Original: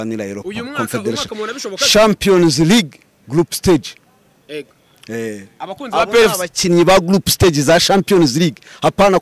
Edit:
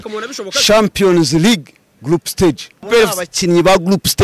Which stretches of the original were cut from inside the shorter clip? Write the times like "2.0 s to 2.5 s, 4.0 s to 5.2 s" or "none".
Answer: 4.1 s to 6.1 s